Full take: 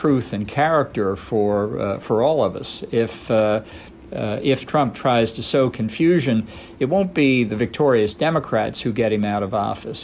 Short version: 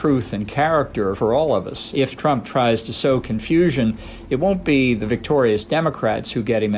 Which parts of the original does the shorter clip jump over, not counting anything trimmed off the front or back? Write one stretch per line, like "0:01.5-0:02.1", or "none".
0:01.2-0:02.0
0:02.8-0:04.4